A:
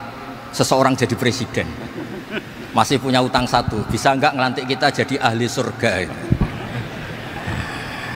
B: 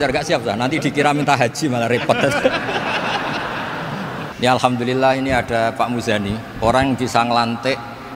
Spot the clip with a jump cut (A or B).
B